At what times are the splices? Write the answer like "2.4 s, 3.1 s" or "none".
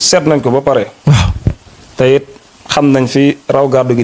none